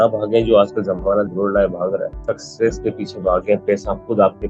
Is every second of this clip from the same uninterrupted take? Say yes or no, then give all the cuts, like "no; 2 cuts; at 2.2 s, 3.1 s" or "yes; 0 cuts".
no; 1 cut; at 2.1 s